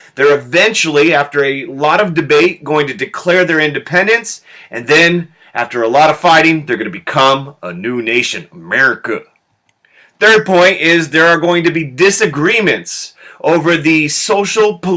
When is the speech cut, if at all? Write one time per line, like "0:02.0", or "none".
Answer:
none